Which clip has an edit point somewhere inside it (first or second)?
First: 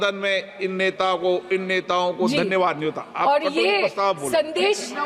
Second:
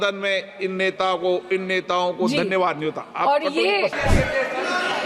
second